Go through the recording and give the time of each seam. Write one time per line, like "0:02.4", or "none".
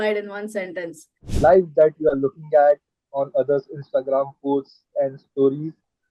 0:01.3